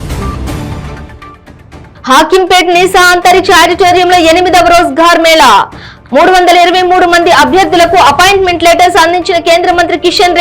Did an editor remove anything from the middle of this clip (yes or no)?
yes